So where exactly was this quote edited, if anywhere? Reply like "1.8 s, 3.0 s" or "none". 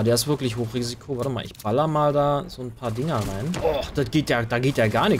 3.6 s